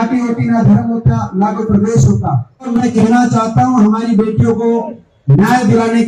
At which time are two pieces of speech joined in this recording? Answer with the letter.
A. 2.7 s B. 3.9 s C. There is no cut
A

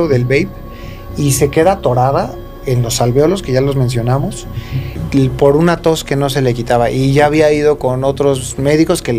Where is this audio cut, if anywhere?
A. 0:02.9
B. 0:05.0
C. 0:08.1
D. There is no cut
B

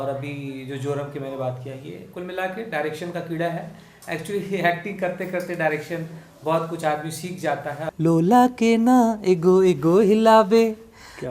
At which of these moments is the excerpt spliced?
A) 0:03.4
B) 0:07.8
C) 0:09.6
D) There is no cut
B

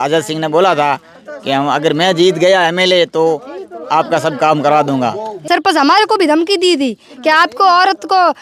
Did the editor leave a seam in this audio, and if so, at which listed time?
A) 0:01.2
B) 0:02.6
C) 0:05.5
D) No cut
C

